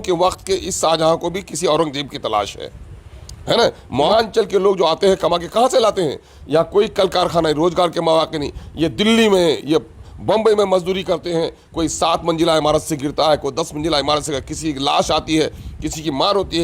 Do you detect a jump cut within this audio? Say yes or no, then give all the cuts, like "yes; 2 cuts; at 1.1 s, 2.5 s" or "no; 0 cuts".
yes; 1 cut; at 4.1 s